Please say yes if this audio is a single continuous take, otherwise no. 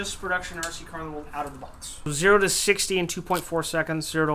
no